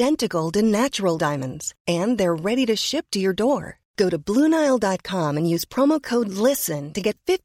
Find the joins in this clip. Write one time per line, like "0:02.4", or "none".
none